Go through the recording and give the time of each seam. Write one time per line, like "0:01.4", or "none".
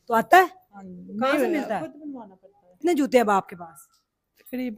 0:02.8